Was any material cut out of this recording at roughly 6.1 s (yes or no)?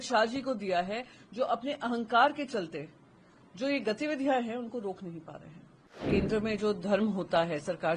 yes